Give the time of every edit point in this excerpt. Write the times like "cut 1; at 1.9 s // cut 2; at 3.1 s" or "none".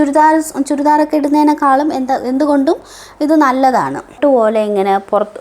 cut 1; at 4.2 s